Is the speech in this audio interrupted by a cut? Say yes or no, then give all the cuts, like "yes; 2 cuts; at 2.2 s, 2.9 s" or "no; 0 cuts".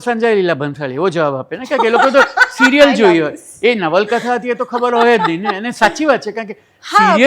no; 0 cuts